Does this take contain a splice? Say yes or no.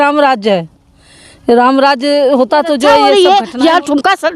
yes